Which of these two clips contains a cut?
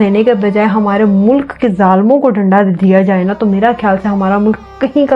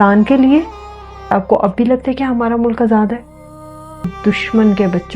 second; 2 cuts; at 1.3 s, 4.1 s

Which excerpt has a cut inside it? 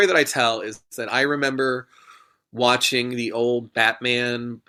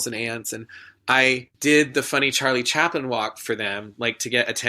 second; 1 cut; at 1.5 s

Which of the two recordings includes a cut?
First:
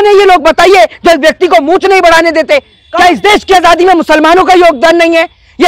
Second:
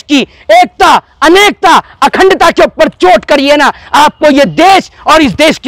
first; 1 cut; at 2.8 s

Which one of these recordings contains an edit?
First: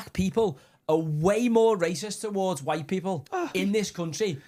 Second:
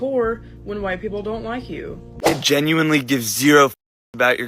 second; 1 cut; at 2.0 s

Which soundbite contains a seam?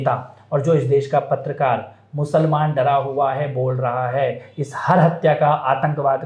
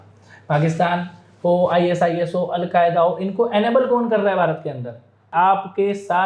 second; 1 cut; at 5.3 s

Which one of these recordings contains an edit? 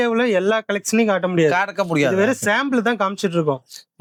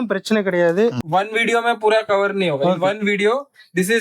second; 1 cut; at 1.0 s

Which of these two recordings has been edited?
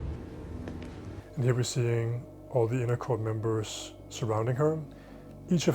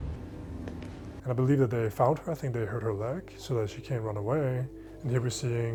first; 1 cut; at 1.1 s

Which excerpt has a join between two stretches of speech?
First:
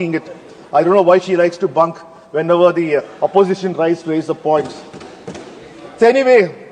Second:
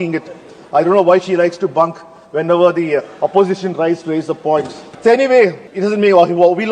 second; 2 cuts; at 4.8 s, 5.7 s

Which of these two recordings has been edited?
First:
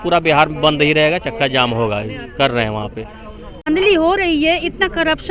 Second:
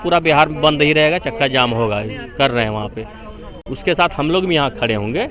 first; 1 cut; at 3.7 s

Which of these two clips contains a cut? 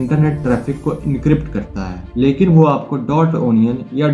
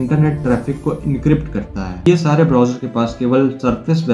second; 1 cut; at 2.0 s

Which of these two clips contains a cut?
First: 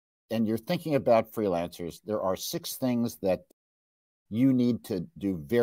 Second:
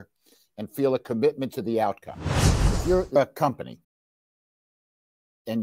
second; 1 cut; at 2.6 s

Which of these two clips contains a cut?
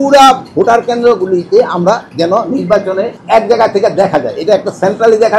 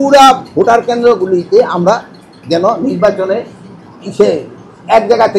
first; 2 cuts; at 2.1 s, 3.2 s

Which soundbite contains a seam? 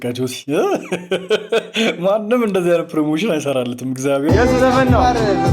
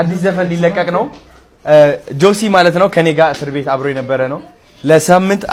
first; 1 cut; at 4.3 s

